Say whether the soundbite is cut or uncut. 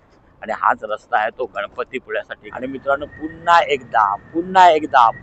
cut